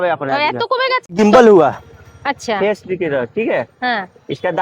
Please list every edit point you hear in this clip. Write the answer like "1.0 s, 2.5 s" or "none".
1.0 s